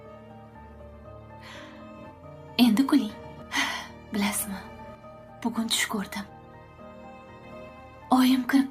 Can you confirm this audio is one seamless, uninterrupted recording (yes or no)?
yes